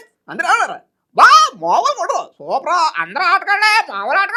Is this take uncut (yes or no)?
yes